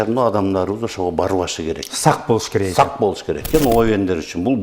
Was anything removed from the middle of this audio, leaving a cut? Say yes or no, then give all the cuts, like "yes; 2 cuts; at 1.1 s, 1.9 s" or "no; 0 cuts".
yes; 1 cut; at 3.4 s